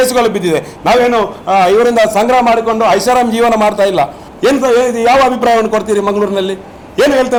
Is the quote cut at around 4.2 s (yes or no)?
no